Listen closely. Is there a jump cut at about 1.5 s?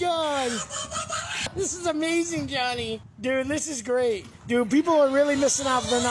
yes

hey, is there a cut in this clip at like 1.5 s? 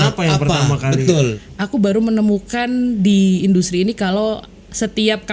yes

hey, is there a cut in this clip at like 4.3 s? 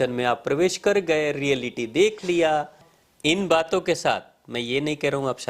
no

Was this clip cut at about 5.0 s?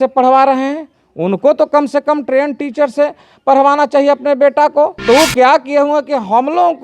yes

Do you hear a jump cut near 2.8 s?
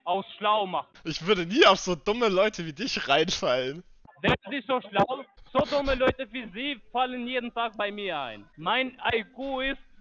no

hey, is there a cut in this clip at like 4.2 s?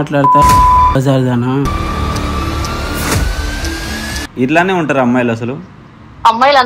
yes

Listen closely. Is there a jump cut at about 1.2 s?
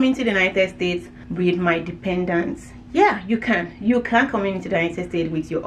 yes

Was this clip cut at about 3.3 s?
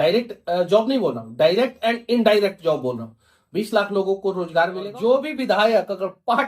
no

